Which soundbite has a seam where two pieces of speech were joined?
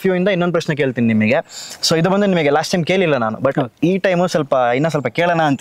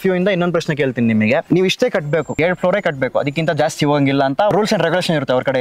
second; 3 cuts; at 1.4 s, 2.3 s, 4.5 s

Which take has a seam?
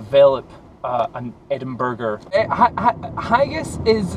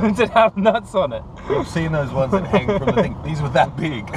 first; 1 cut; at 2.3 s

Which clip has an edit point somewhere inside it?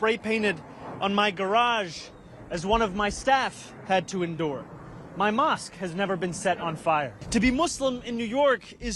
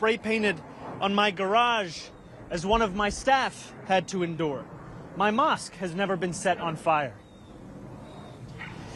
first; 1 cut; at 7.2 s

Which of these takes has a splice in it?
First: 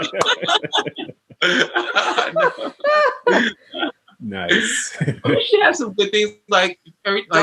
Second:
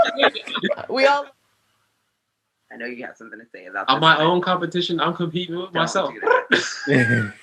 second; 1 cut; at 1.2 s

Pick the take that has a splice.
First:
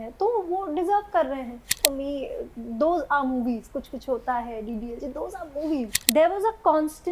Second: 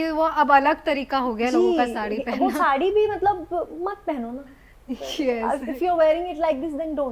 first; 2 cuts; at 1.7 s, 6.0 s

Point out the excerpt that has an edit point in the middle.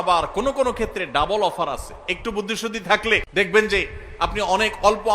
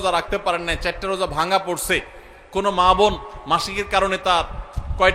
first; 1 cut; at 3.3 s

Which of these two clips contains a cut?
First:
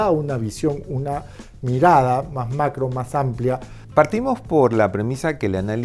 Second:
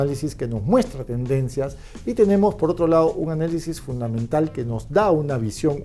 first; 1 cut; at 3.7 s

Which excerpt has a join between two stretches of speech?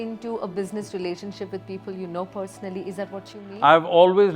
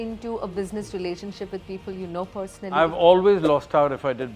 second; 1 cut; at 2.8 s

